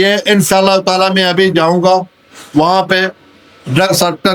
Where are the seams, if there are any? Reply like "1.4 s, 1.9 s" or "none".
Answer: none